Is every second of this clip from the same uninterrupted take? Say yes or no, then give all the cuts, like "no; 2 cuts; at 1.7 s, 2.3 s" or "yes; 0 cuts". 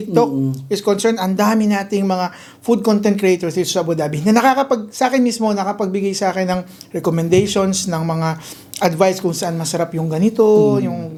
yes; 0 cuts